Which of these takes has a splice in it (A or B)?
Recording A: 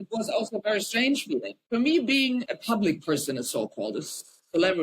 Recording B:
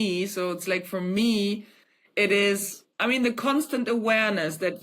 A